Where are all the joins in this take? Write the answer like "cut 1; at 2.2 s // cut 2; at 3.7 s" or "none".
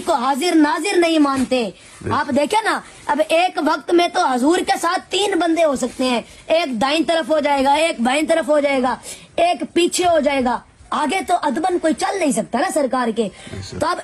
none